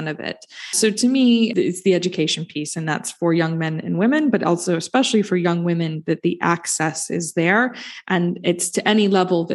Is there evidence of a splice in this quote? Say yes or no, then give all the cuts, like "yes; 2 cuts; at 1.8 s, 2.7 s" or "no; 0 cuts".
yes; 2 cuts; at 0.8 s, 1.5 s